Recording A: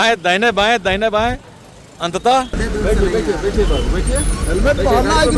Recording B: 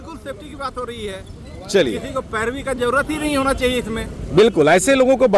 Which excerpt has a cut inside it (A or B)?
A